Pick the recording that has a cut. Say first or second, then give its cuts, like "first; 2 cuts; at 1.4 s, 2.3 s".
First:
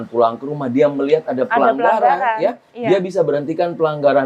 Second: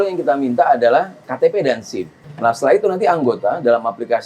second; 2 cuts; at 1.2 s, 2.2 s